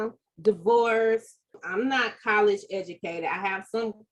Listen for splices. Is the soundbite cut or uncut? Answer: cut